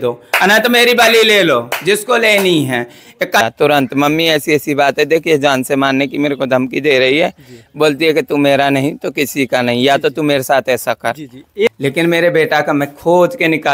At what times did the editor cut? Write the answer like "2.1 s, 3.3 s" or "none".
3.4 s, 11.7 s